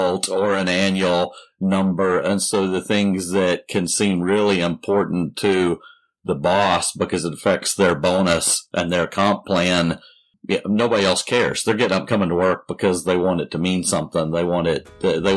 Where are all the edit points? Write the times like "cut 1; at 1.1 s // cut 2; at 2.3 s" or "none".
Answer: cut 1; at 10.3 s

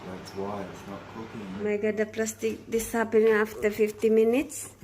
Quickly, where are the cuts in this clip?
cut 1; at 1.6 s

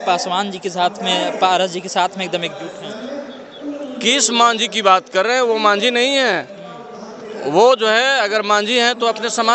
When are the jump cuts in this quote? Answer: none

